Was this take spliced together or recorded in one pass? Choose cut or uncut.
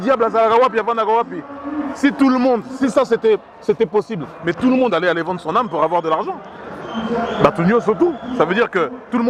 uncut